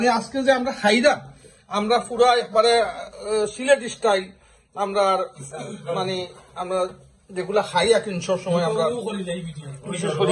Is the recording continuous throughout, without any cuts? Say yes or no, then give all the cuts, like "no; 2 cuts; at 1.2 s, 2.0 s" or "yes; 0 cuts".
yes; 0 cuts